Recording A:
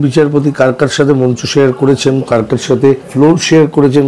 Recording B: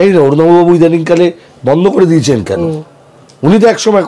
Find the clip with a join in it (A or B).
A